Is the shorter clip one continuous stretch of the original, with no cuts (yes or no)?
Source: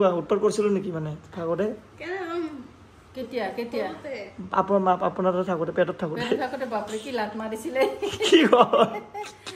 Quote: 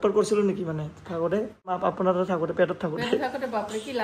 no